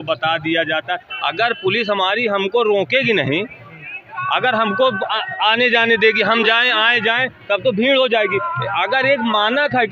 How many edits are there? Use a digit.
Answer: 0